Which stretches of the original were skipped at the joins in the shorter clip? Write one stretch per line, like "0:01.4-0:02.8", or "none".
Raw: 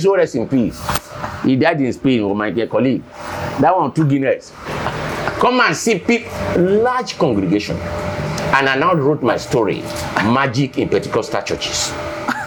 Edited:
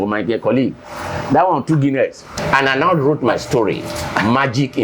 0:04.6-0:08.3